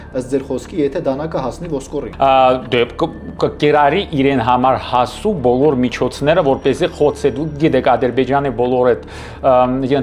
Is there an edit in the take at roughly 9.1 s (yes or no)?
no